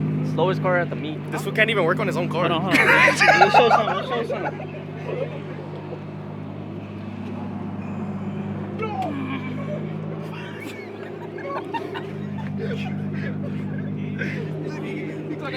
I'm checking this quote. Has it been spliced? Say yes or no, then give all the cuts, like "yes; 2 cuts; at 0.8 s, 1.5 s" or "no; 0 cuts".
no; 0 cuts